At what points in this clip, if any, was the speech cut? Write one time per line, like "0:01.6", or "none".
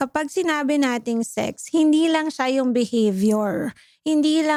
none